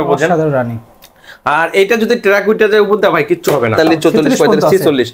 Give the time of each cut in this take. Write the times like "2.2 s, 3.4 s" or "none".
3.7 s